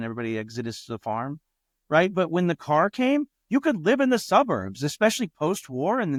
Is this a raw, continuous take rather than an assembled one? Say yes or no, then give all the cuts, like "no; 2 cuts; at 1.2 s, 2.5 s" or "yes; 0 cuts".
yes; 0 cuts